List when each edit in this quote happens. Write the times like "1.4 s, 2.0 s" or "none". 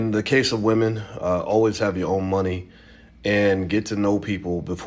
2.6 s